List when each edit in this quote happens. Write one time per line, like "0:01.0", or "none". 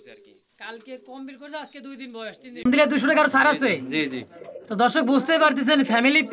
0:02.7